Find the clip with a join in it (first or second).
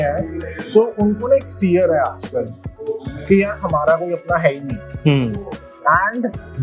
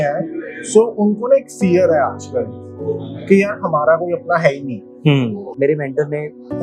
second